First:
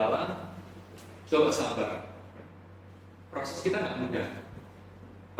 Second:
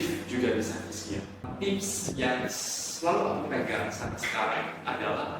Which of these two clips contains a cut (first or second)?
second